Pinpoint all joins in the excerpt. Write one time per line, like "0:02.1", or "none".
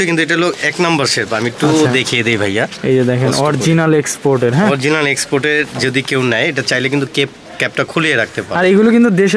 none

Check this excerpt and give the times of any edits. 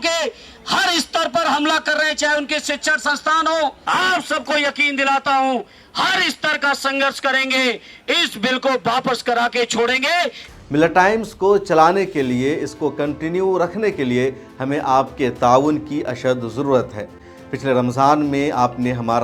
0:03.8
0:10.4

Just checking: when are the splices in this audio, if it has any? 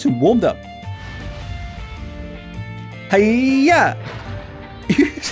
none

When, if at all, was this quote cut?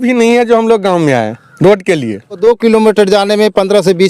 0:02.4

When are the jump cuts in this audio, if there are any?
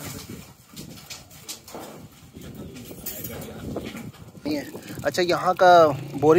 0:04.4

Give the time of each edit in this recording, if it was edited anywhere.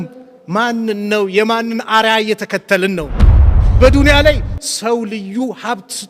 0:03.4

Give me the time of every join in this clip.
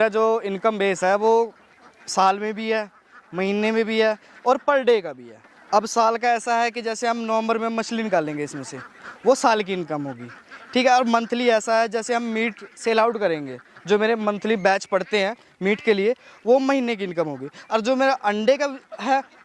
none

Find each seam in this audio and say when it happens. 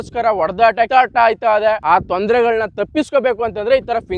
0:00.9
0:01.8

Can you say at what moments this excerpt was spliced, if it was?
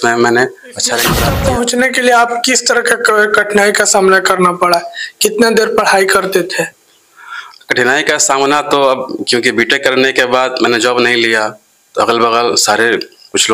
0:01.3

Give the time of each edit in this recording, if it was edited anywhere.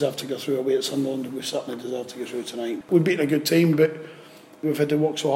0:02.9
0:04.6

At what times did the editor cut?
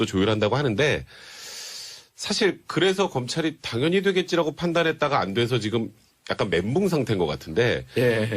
0:04.2

